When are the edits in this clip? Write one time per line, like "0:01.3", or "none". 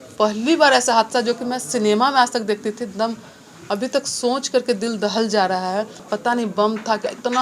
0:06.0